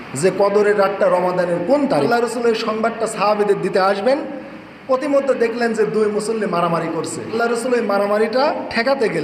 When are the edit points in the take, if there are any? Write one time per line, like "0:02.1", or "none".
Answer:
0:02.1
0:07.3

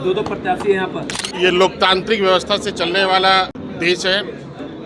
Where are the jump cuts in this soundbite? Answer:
0:01.2
0:03.6

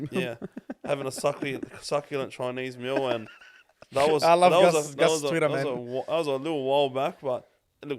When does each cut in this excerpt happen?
none

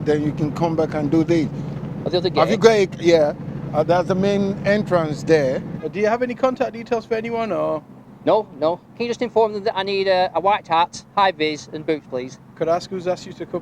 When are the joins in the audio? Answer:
0:05.8
0:09.0
0:12.5

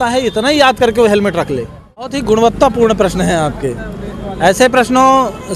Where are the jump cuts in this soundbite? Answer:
0:02.2

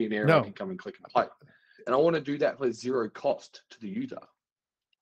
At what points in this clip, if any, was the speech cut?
0:01.9

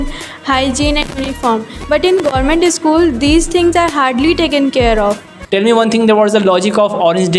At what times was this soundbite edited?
0:05.3

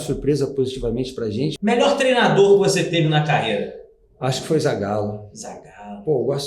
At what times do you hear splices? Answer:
0:01.5

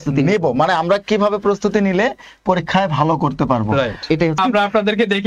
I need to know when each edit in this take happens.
0:04.4

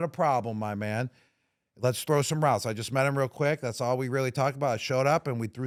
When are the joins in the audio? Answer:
none

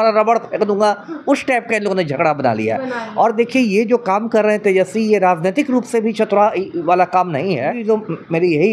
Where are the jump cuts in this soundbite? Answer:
0:07.8

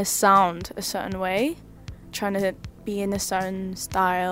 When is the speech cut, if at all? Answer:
0:02.1

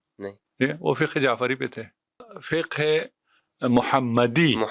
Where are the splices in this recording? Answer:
0:02.2

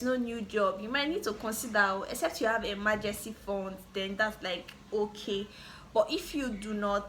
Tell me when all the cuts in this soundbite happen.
none

